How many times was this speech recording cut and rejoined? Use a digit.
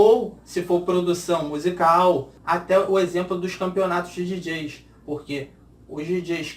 1